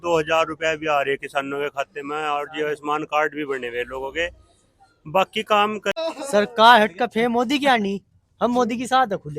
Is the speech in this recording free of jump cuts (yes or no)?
no